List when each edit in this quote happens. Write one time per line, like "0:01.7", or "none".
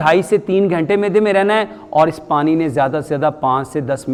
none